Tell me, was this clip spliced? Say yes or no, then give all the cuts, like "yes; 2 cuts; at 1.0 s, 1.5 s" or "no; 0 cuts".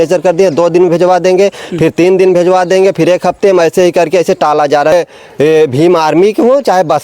yes; 1 cut; at 4.9 s